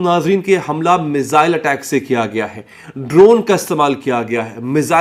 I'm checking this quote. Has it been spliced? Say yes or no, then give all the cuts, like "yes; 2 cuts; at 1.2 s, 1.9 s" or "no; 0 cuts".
no; 0 cuts